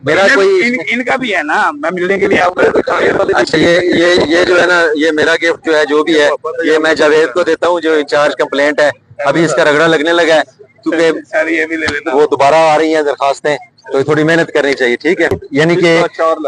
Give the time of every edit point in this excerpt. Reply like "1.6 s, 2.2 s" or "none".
15.4 s